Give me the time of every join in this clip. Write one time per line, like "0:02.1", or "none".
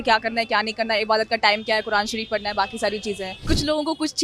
0:03.3